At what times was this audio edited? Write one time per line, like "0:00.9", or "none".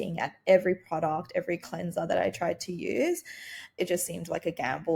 0:03.8